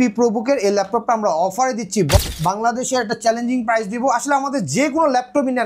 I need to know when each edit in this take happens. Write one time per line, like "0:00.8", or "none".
0:02.2